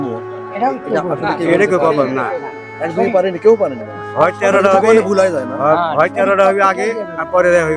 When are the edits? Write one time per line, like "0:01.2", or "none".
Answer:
none